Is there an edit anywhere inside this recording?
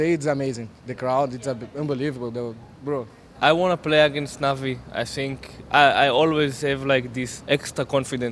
yes; 2 cuts; at 3.3 s, 7.3 s

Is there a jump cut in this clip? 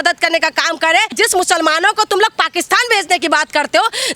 yes; 1 cut; at 1.1 s

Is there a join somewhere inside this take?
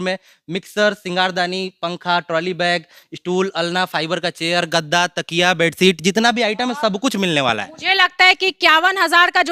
no; 0 cuts

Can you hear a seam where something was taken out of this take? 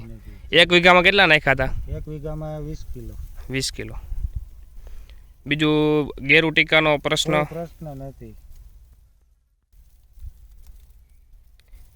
yes; 1 cut; at 9.7 s

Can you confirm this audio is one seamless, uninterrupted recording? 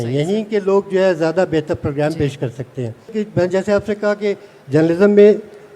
no; 1 cut; at 3.1 s

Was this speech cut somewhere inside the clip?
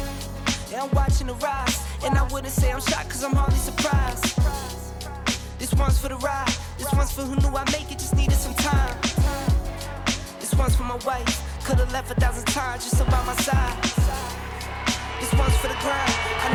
no; 0 cuts

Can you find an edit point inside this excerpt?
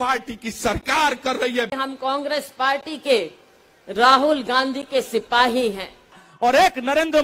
yes; 2 cuts; at 1.7 s, 6.3 s

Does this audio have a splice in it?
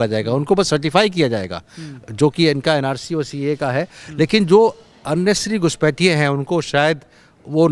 no; 0 cuts

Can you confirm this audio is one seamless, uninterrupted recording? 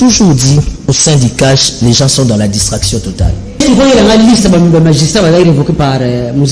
no; 1 cut; at 3.6 s

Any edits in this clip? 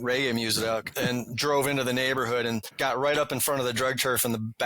yes; 2 cuts; at 0.9 s, 2.7 s

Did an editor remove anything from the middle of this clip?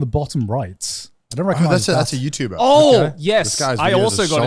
yes; 1 cut; at 2.5 s

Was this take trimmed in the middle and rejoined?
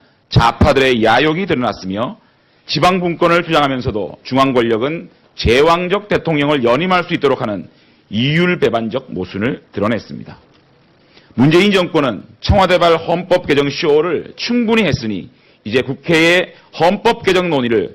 yes; 1 cut; at 13.0 s

